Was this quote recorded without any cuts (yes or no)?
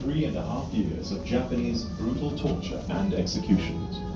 yes